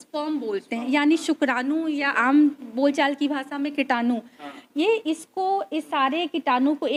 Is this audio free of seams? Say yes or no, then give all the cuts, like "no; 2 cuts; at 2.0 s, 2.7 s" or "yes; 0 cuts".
yes; 0 cuts